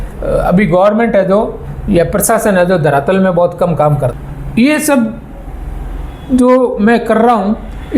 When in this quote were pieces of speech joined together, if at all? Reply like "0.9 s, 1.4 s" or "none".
4.2 s